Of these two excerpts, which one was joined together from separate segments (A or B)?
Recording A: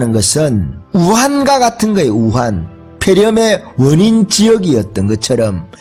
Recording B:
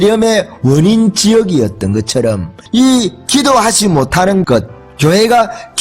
B